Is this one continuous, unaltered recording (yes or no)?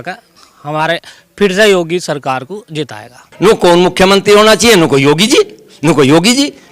no